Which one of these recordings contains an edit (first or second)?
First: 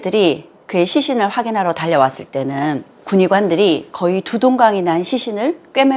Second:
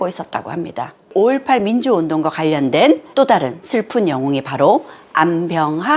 second